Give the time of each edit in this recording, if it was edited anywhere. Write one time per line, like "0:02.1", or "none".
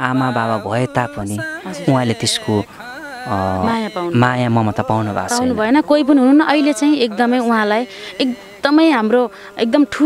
none